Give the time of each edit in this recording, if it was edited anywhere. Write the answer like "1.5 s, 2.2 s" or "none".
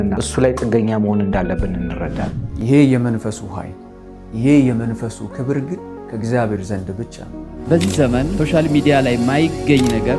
2.3 s, 7.6 s

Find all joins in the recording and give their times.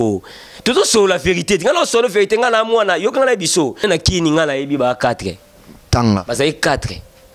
3.8 s

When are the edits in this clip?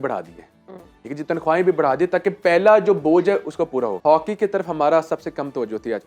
4.0 s

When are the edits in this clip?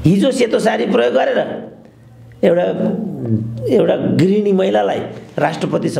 none

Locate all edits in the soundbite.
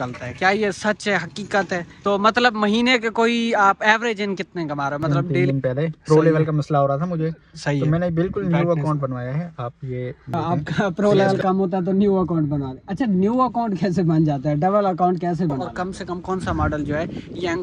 1.9 s, 5.5 s, 10.2 s, 15.7 s

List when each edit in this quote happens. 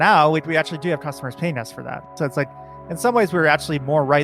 2.1 s

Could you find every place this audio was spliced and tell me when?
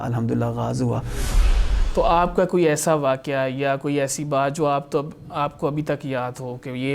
1.5 s

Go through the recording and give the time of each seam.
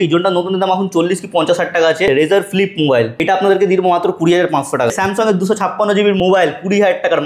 2.1 s, 3.2 s, 4.9 s, 6.2 s

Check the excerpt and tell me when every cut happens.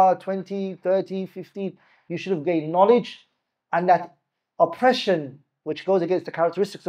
none

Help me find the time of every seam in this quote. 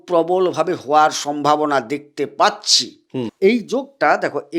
3.3 s

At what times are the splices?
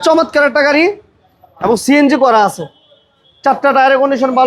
none

